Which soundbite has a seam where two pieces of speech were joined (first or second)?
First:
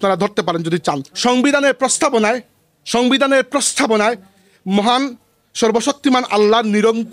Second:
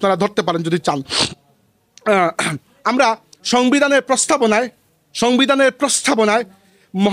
first